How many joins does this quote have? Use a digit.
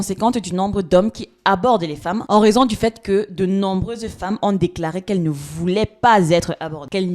1